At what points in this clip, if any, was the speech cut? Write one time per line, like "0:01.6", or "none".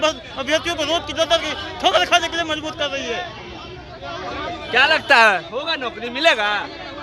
none